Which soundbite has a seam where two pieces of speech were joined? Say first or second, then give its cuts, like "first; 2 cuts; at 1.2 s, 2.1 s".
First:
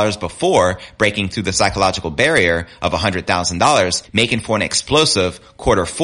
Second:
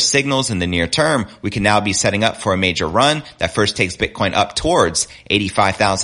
first; 1 cut; at 4.0 s